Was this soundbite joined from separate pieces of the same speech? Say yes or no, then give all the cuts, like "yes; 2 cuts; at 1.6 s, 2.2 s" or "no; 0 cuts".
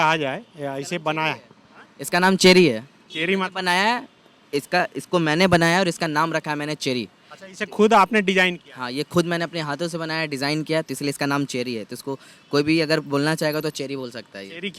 no; 0 cuts